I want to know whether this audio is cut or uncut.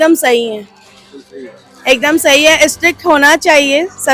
uncut